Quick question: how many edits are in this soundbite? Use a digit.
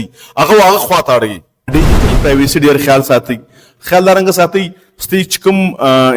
1